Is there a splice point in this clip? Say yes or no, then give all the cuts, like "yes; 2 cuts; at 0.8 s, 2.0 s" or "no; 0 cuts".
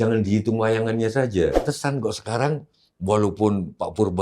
yes; 1 cut; at 1.7 s